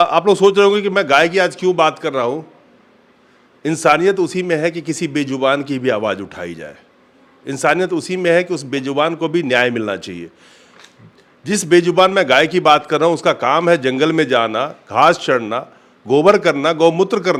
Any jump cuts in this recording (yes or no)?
no